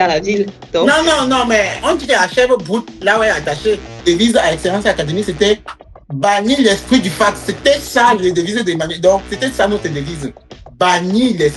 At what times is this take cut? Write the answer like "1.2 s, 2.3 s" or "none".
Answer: 4.0 s